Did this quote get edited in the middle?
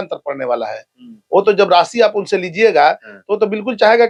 no; 0 cuts

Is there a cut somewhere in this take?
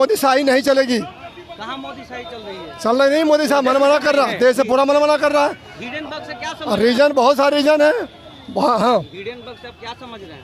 no; 0 cuts

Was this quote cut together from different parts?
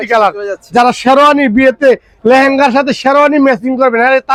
no; 0 cuts

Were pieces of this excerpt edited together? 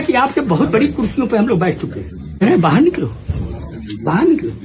yes; 1 cut; at 2.4 s

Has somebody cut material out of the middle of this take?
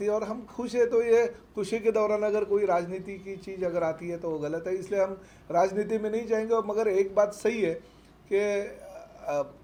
no; 0 cuts

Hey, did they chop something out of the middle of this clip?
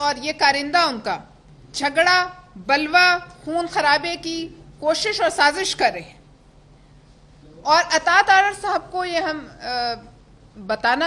no; 0 cuts

